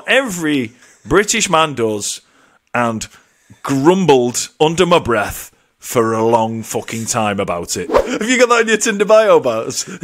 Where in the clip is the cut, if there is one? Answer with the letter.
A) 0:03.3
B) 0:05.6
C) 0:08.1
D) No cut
C